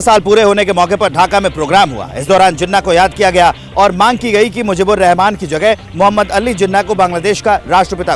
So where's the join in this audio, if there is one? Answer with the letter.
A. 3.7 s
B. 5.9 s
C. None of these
C